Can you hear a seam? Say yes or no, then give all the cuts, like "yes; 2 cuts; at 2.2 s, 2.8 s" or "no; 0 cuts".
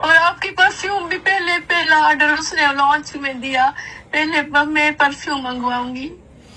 no; 0 cuts